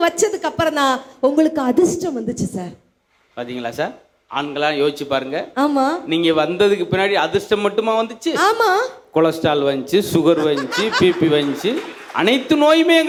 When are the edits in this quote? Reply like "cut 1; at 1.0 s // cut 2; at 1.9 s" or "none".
none